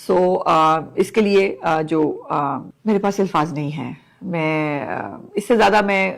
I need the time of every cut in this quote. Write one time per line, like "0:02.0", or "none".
0:02.7